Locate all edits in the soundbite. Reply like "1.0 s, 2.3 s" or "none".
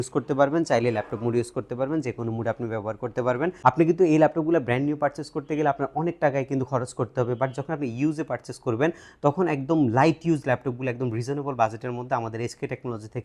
3.6 s